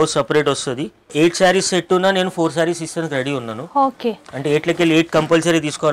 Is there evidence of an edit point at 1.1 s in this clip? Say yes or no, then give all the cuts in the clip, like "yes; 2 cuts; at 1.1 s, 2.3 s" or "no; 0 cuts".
yes; 1 cut; at 1.1 s